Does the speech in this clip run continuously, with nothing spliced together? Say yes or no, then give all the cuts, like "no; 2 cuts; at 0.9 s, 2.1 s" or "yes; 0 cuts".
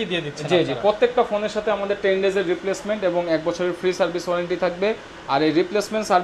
yes; 0 cuts